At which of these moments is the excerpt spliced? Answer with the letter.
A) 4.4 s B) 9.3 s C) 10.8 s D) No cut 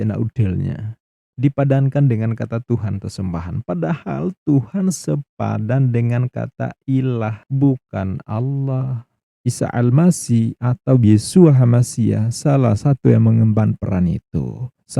B